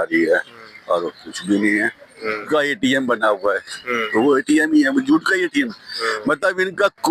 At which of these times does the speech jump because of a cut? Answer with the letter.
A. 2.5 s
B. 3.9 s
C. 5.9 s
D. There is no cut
A